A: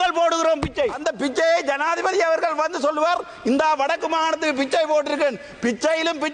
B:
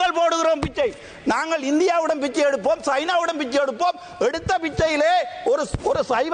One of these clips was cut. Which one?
A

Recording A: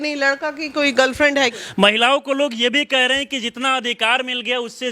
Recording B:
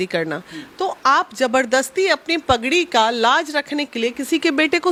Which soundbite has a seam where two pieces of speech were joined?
A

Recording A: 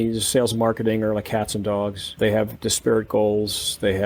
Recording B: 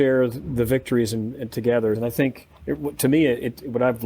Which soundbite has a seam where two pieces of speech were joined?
B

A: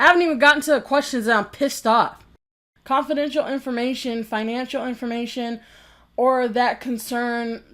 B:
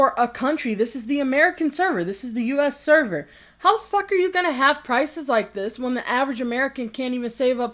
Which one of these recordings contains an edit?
A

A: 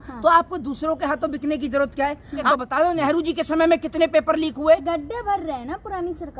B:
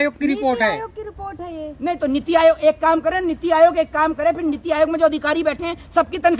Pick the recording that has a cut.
A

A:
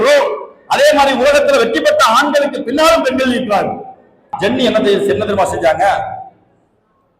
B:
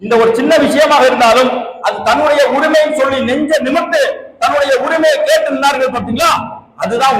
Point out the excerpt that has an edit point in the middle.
A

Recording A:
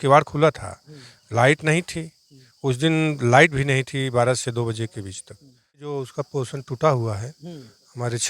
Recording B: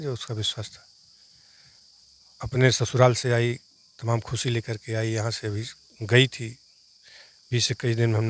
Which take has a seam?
A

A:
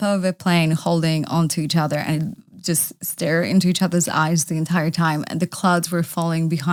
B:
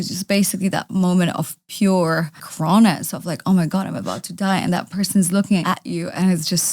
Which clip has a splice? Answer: B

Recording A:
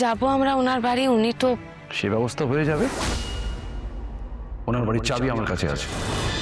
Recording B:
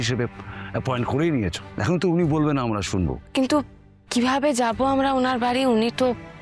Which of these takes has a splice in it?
B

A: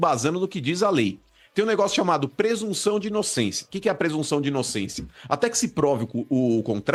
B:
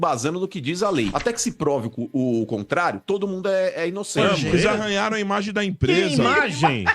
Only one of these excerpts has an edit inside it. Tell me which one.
B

